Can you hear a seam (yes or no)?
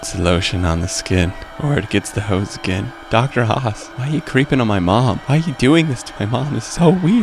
yes